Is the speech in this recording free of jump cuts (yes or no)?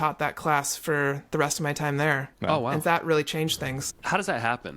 no